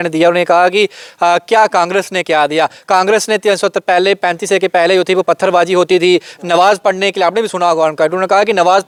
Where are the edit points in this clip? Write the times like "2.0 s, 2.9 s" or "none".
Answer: none